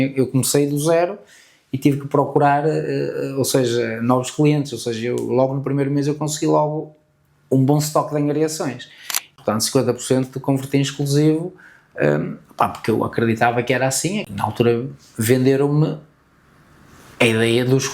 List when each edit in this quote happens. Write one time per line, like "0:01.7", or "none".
0:09.3
0:14.2